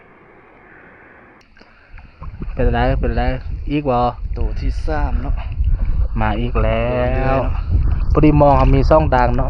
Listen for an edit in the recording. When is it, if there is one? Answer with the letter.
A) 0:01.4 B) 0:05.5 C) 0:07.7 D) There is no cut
A